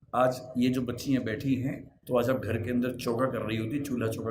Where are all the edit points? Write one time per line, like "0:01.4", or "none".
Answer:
0:01.9